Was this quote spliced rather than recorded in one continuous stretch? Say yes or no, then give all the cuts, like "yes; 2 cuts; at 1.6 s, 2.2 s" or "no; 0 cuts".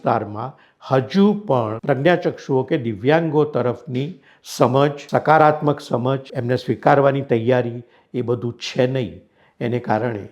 yes; 3 cuts; at 1.8 s, 5.0 s, 6.3 s